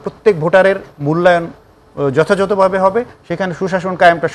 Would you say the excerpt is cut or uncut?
uncut